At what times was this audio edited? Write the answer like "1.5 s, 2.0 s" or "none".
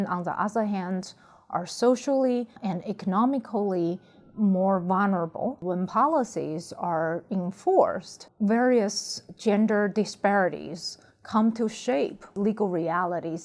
2.6 s, 5.6 s, 12.2 s